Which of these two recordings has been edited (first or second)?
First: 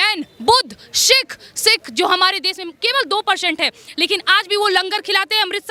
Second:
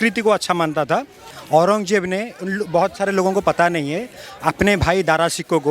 second